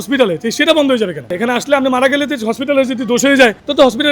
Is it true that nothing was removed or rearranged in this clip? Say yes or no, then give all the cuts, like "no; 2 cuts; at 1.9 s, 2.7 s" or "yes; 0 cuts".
no; 1 cut; at 1.4 s